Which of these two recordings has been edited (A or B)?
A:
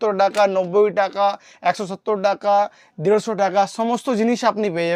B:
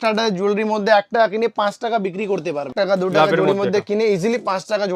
B